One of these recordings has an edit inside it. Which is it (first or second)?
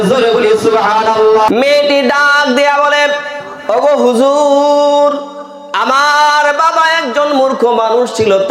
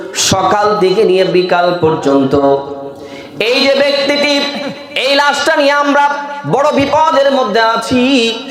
first